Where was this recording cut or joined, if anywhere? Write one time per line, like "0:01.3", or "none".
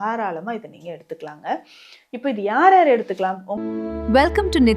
0:03.5